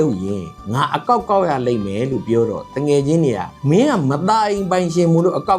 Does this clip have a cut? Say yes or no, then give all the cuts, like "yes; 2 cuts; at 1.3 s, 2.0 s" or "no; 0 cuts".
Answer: no; 0 cuts